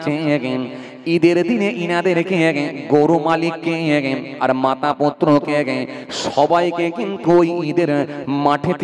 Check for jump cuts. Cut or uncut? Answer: uncut